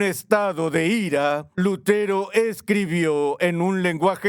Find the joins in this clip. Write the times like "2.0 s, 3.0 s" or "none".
1.5 s